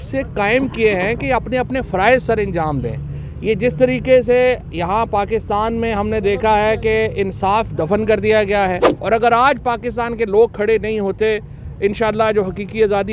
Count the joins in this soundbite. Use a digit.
1